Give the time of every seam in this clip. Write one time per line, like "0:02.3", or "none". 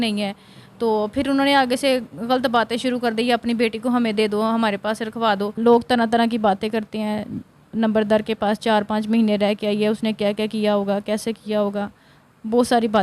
0:05.5